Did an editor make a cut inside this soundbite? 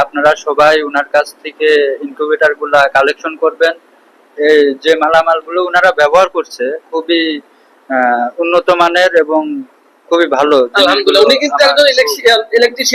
no; 0 cuts

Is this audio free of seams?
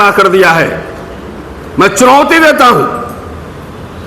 yes; 0 cuts

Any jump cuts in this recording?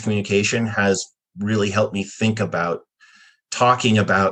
no; 0 cuts

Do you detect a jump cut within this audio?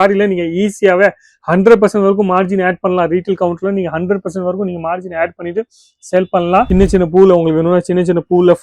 yes; 1 cut; at 6.7 s

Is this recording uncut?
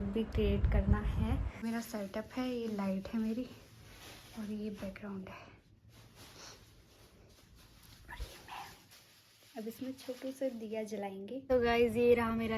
no; 2 cuts; at 1.6 s, 11.4 s

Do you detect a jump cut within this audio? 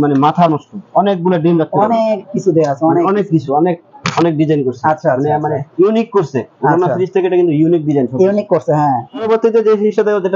yes; 1 cut; at 9.2 s

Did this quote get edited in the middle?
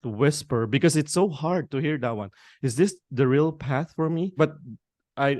yes; 1 cut; at 4.3 s

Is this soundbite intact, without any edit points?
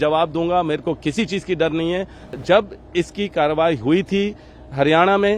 no; 1 cut; at 2.4 s

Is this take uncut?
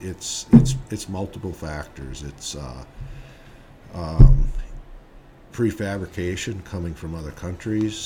yes; 0 cuts

